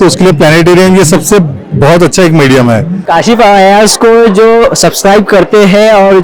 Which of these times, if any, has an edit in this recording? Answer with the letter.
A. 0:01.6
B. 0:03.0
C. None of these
B